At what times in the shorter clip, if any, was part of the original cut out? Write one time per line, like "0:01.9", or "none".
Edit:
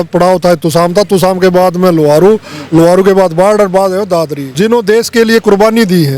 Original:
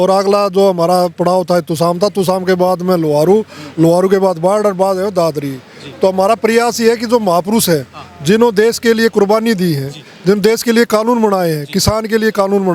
0:04.4